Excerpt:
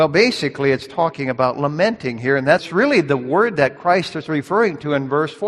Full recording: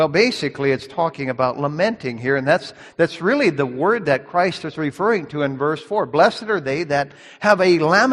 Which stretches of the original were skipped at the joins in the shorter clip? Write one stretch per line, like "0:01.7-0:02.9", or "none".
0:02.7-0:03.2